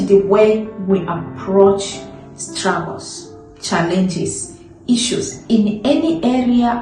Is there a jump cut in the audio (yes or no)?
no